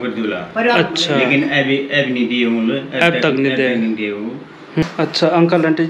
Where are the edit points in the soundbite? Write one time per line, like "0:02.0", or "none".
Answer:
0:04.8